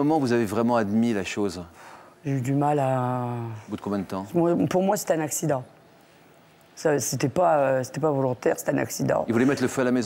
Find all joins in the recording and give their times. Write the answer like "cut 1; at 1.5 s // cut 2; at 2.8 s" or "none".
none